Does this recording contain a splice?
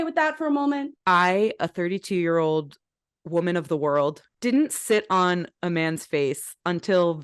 yes; 2 cuts; at 0.9 s, 4.3 s

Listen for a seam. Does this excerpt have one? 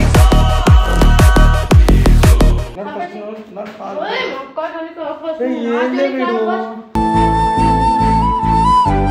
no; 0 cuts

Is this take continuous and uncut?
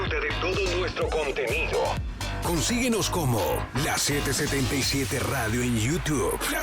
yes; 0 cuts

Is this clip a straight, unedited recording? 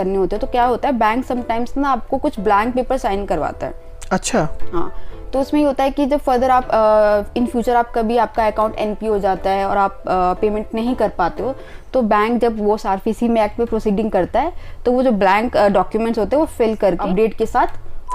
no; 1 cut; at 17.0 s

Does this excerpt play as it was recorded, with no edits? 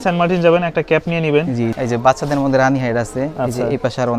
no; 1 cut; at 1.7 s

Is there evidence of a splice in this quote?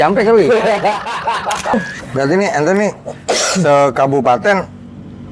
yes; 1 cut; at 1.7 s

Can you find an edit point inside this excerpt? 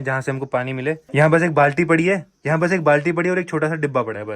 no; 0 cuts

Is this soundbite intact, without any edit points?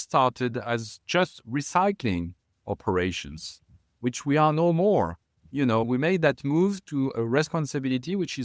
yes; 0 cuts

